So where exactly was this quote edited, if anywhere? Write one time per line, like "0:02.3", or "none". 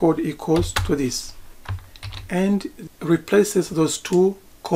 0:02.8